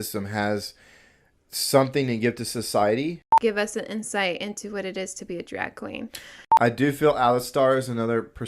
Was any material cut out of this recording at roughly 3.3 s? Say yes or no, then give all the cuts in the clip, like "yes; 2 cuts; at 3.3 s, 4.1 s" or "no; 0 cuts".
yes; 2 cuts; at 3.3 s, 6.4 s